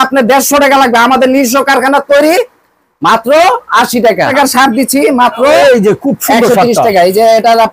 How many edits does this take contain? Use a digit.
1